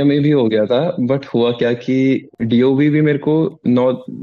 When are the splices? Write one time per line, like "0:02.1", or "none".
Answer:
0:02.3